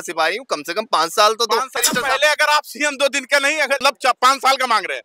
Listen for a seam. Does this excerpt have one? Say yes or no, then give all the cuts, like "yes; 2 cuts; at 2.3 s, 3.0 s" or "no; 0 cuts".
yes; 2 cuts; at 1.8 s, 3.8 s